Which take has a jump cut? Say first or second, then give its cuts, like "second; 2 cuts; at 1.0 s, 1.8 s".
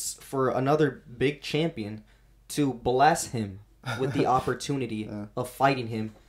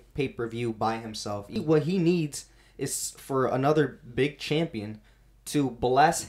second; 1 cut; at 1.5 s